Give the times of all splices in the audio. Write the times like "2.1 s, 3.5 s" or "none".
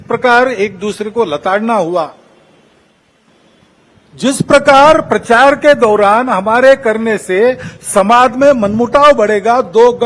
none